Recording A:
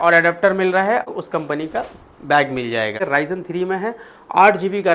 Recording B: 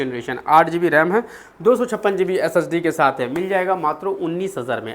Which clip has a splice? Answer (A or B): A